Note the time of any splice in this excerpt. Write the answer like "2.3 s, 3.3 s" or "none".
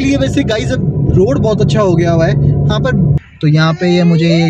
3.2 s